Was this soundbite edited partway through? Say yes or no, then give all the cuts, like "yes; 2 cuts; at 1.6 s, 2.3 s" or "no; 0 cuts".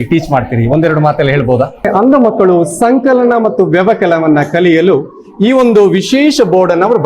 yes; 1 cut; at 1.8 s